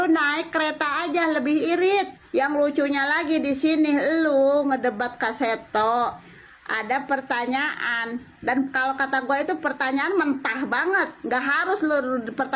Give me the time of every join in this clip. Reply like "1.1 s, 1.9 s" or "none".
2.2 s

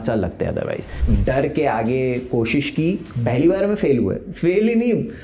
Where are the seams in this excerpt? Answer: 0.9 s

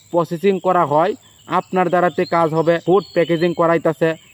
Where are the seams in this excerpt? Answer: 2.8 s

